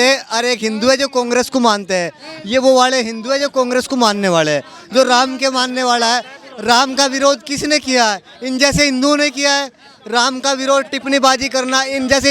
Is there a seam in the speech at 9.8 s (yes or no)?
no